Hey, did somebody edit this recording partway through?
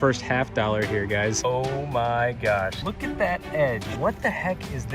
yes; 3 cuts; at 1.4 s, 2.8 s, 3.9 s

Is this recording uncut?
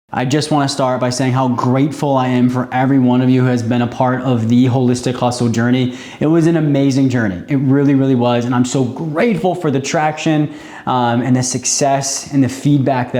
yes; 0 cuts

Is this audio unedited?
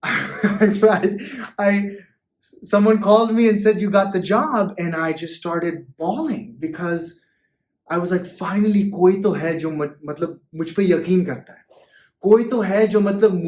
yes; 0 cuts

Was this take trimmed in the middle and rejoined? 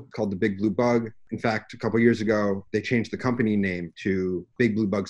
yes; 2 cuts; at 2.6 s, 3.9 s

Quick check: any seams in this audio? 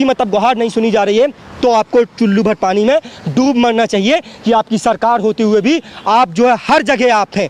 no; 0 cuts

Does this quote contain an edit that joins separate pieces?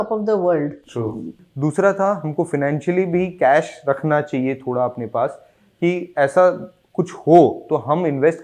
yes; 1 cut; at 1.3 s

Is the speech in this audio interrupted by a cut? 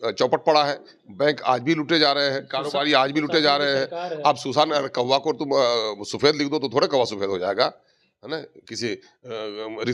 no; 0 cuts

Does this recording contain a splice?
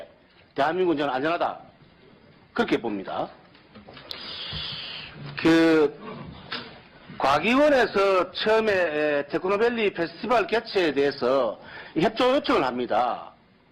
no; 0 cuts

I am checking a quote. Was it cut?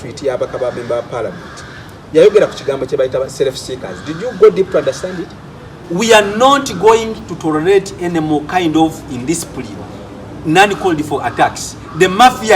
yes; 1 cut; at 5.8 s

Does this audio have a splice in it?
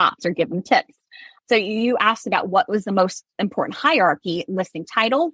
yes; 1 cut; at 1.3 s

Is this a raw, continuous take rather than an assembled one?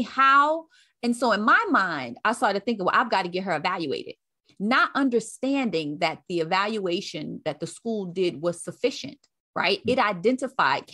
yes; 0 cuts

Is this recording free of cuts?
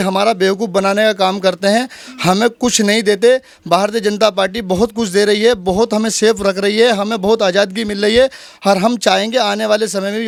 yes; 0 cuts

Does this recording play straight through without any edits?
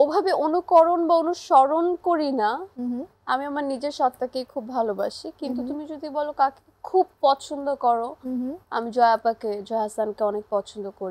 yes; 0 cuts

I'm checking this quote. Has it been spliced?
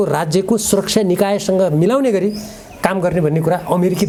no; 0 cuts

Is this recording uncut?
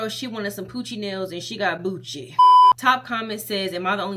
no; 1 cut; at 2.7 s

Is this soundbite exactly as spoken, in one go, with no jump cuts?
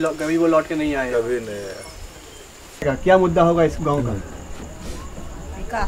no; 1 cut; at 2.8 s

